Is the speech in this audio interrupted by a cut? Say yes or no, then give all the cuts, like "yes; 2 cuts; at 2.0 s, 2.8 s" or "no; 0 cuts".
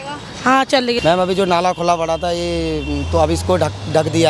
yes; 1 cut; at 1.0 s